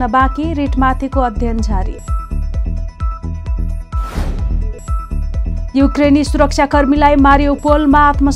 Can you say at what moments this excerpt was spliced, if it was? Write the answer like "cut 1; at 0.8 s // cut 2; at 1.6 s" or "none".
none